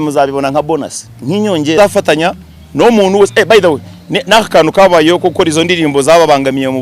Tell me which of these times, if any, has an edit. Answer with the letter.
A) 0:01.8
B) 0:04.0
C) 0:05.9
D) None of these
A